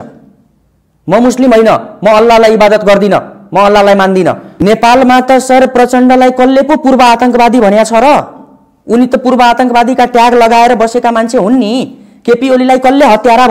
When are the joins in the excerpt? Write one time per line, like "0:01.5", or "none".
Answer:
0:04.5